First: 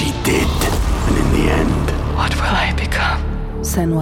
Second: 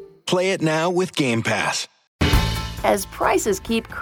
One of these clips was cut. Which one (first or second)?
second